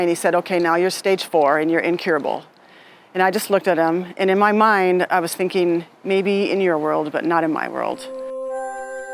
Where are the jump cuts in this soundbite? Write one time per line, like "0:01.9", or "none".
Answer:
0:08.2